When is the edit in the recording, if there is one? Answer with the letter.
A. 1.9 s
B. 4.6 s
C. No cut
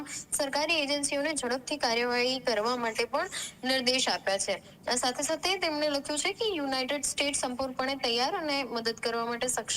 C